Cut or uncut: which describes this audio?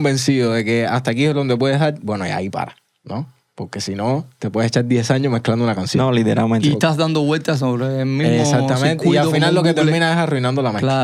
uncut